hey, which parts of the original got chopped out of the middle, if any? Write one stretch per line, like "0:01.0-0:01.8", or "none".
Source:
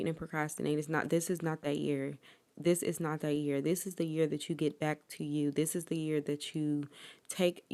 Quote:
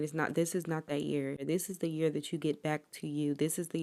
0:02.2-0:03.6